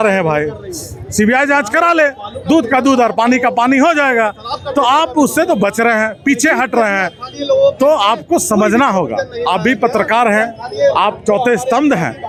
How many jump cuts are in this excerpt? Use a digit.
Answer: 0